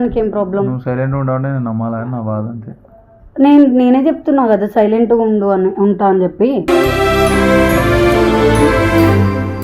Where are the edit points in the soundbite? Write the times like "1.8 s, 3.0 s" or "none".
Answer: none